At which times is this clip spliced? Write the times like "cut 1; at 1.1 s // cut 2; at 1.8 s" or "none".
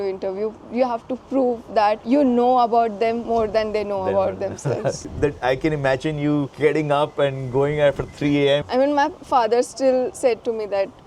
cut 1; at 5.0 s // cut 2; at 8.7 s